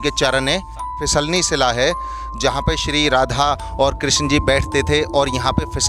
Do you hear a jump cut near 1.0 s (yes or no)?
yes